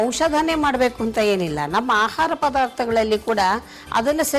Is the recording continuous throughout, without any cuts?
yes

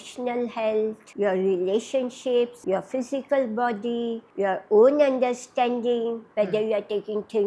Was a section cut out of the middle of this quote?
yes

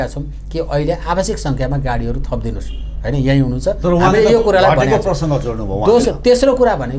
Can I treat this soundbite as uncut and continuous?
yes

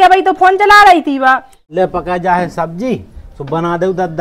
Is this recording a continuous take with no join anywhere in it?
no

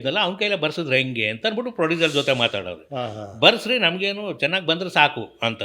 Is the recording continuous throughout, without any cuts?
yes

